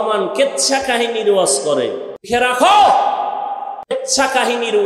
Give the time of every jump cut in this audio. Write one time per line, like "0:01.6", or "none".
0:02.3
0:03.9